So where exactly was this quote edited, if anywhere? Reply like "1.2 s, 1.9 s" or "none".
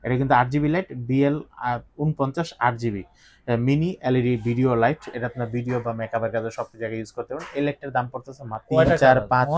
8.6 s